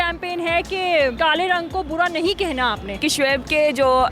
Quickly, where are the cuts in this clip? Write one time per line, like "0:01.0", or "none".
0:01.1
0:03.0

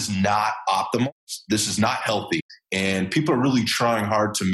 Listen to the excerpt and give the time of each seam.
0:01.1
0:02.6

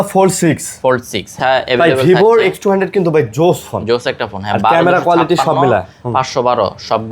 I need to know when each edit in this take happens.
0:01.3

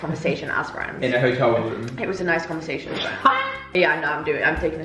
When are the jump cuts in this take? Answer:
none

